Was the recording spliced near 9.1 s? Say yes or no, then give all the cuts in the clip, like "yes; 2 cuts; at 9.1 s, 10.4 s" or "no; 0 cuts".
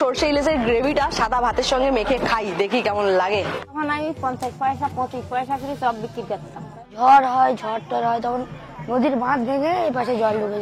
no; 2 cuts; at 3.8 s, 6.9 s